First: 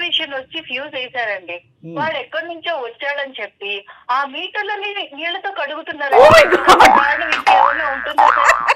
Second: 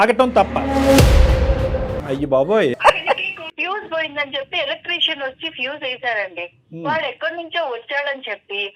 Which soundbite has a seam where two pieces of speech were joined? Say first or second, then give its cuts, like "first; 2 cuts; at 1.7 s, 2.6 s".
second; 2 cuts; at 1.9 s, 3.5 s